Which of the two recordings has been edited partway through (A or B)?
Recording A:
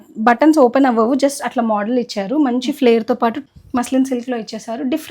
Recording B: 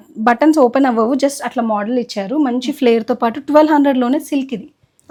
A